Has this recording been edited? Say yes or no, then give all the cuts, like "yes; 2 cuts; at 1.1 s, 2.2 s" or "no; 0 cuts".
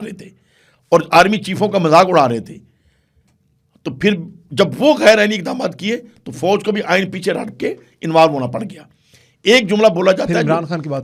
no; 0 cuts